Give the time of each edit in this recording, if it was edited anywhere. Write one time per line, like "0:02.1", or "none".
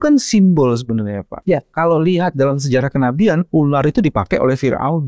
0:01.3